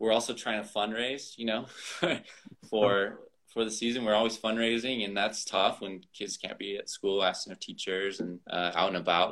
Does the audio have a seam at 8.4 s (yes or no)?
yes